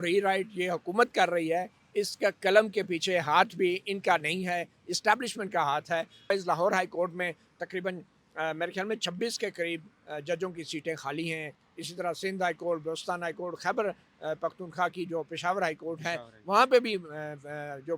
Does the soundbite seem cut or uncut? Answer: cut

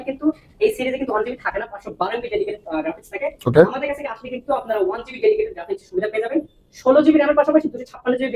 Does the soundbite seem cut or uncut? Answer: uncut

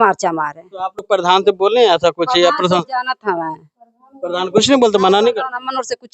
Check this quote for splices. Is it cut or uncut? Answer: uncut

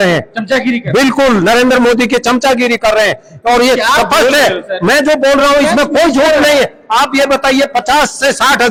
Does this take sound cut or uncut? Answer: uncut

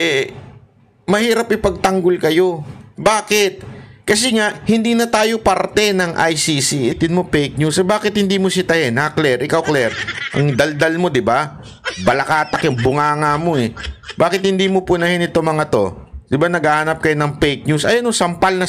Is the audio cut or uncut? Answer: cut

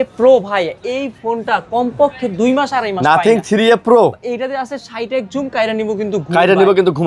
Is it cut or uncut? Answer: uncut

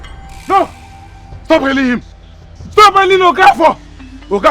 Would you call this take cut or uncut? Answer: uncut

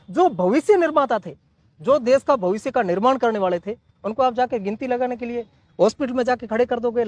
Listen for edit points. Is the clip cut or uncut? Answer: uncut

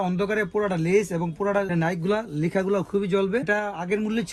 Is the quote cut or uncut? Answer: uncut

